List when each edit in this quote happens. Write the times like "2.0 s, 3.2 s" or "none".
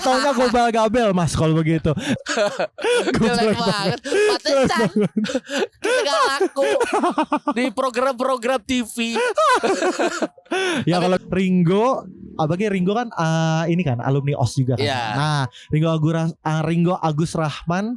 2.2 s, 11.2 s